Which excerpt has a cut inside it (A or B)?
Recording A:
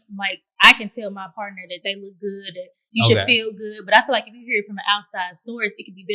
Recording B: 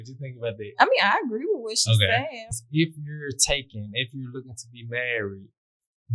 B